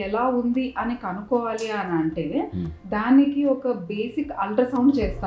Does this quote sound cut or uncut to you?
uncut